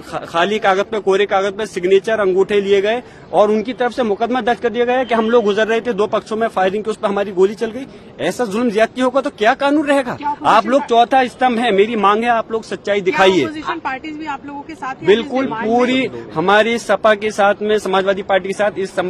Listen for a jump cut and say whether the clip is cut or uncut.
uncut